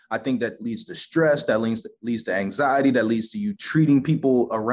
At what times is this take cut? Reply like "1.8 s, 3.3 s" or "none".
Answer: 3.6 s